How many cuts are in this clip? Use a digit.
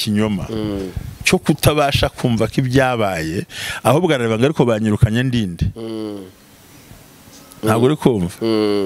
0